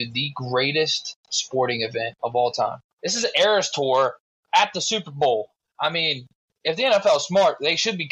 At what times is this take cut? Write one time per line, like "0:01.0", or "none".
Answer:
0:02.1
0:02.9